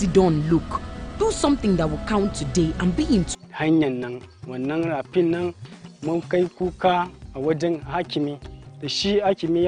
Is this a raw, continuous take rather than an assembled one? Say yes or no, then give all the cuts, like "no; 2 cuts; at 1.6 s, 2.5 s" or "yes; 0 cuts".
no; 1 cut; at 3.3 s